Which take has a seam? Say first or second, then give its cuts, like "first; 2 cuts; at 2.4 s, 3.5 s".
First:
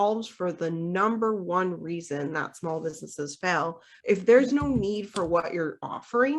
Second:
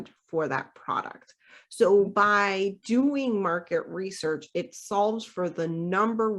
first; 1 cut; at 3.9 s